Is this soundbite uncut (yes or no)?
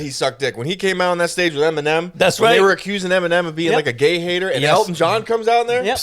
yes